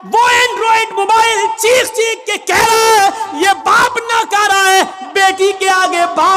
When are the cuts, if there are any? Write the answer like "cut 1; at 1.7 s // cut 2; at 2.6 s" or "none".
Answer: none

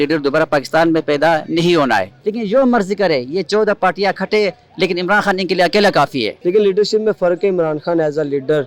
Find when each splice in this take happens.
cut 1; at 2.2 s // cut 2; at 6.3 s

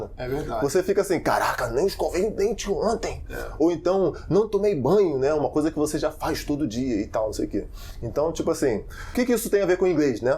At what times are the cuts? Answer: cut 1; at 9.0 s

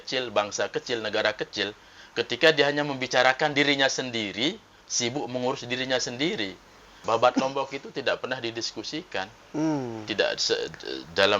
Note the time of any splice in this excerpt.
cut 1; at 7.0 s

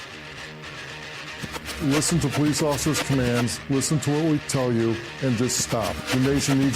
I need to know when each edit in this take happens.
cut 1; at 1.4 s

